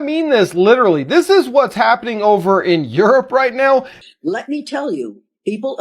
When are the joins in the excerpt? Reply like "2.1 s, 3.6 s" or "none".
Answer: 3.9 s